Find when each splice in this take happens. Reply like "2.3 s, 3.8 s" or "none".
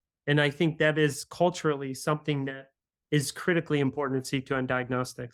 none